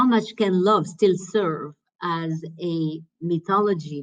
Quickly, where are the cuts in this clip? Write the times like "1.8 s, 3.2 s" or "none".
3.1 s